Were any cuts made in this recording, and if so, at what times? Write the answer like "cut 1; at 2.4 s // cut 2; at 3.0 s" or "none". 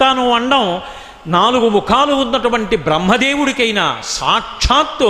none